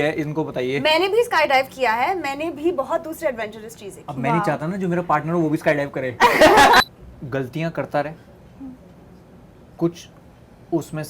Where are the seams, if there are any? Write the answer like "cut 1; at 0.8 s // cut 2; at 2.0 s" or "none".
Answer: cut 1; at 6.8 s